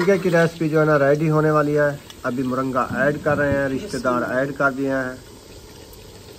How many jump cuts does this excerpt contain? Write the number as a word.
zero